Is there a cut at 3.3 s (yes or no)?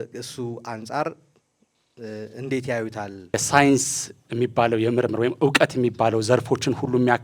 yes